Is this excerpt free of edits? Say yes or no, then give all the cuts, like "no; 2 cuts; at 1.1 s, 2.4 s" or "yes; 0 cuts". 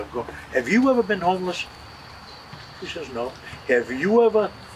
yes; 0 cuts